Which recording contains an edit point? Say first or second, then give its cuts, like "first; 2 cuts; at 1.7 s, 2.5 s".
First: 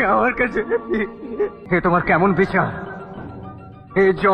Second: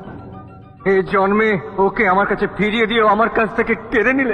first; 1 cut; at 1.6 s